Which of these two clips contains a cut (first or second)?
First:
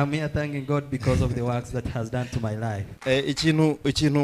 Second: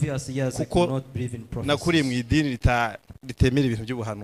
first